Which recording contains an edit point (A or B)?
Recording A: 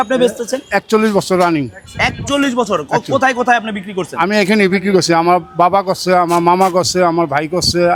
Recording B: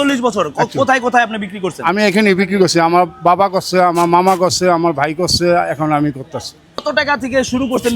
B